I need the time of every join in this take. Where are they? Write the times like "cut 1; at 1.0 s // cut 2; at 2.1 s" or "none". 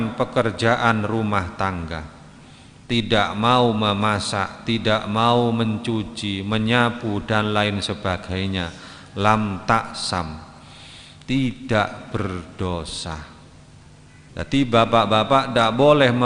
cut 1; at 14.2 s